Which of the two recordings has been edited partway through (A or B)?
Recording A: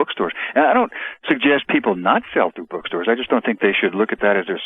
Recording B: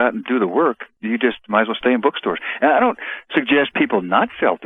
B